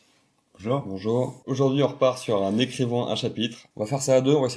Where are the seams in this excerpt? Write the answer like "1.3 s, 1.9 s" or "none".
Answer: 1.4 s, 3.6 s